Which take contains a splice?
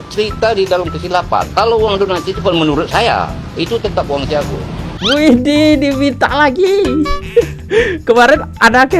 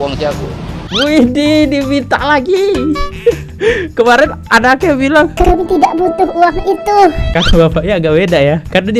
first; 1 cut; at 1.5 s

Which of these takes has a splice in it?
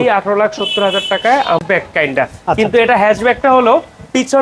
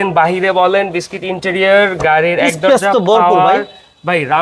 first; 1 cut; at 1.6 s

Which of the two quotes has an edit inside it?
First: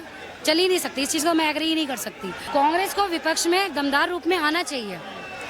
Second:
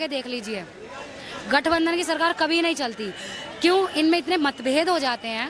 first; 1 cut; at 2.3 s

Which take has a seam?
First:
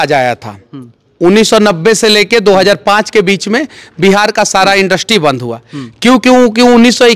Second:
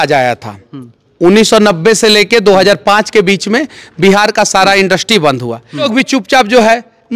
second; 1 cut; at 5.9 s

